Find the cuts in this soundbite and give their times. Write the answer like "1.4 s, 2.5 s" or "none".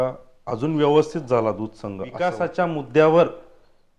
2.2 s